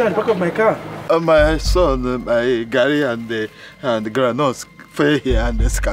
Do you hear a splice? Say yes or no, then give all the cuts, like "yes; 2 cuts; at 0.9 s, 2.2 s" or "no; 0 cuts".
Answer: no; 0 cuts